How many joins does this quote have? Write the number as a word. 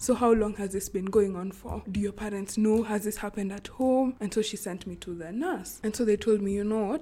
three